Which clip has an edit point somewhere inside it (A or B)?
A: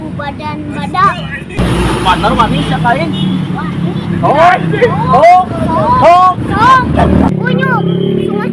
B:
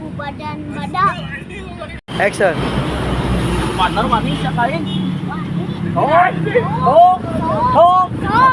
A